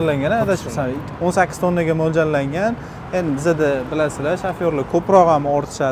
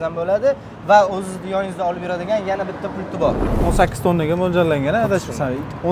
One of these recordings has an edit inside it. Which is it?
second; 1 cut; at 3.5 s

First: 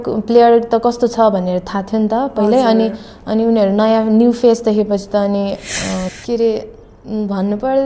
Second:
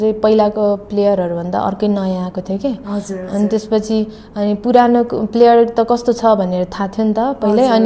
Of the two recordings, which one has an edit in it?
first; 1 cut; at 6.1 s

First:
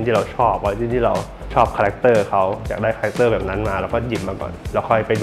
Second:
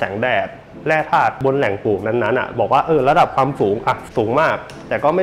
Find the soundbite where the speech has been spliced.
second; 2 cuts; at 1.4 s, 4.0 s

